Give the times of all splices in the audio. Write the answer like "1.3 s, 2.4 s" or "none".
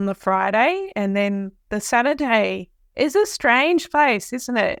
none